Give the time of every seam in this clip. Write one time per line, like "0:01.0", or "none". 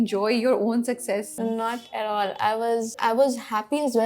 0:01.3
0:03.0